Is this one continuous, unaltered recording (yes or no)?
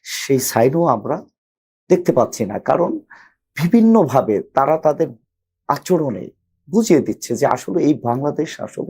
yes